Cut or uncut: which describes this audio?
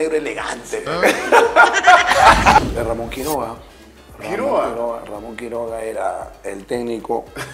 cut